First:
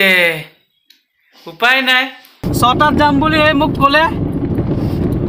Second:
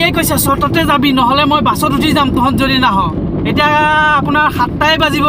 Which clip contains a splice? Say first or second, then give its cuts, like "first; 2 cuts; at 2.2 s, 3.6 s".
first; 1 cut; at 2.4 s